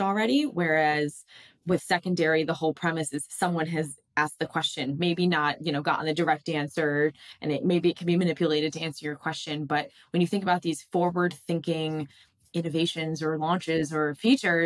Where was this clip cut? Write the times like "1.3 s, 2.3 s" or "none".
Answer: none